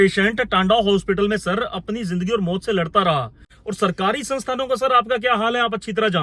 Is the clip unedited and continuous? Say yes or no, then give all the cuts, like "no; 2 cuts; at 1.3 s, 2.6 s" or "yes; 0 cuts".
no; 1 cut; at 3.5 s